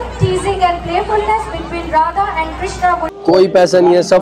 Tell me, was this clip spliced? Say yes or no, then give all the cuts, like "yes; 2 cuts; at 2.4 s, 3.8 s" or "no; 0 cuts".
yes; 1 cut; at 3.1 s